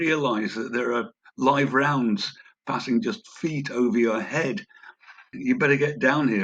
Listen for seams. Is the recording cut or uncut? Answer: cut